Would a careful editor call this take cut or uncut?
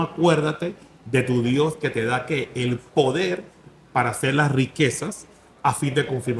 uncut